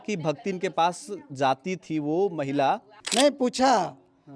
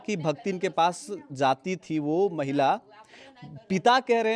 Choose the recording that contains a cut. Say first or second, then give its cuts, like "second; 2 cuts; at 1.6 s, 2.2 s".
first; 1 cut; at 3.0 s